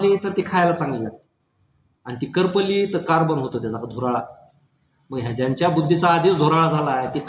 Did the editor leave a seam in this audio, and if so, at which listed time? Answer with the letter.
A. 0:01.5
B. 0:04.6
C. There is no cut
C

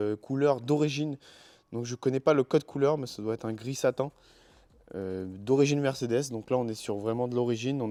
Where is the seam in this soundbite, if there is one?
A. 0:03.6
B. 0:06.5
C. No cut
C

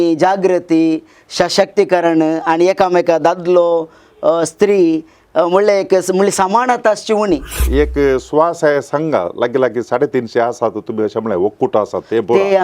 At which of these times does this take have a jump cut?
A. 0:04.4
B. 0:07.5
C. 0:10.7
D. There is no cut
B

